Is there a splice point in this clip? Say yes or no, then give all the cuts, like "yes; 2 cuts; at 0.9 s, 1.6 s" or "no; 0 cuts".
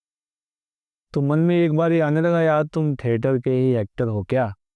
no; 0 cuts